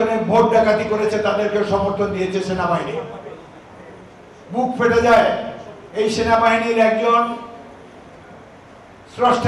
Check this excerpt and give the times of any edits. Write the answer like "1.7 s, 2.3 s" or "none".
none